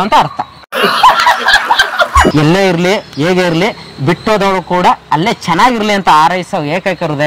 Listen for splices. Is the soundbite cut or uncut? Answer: cut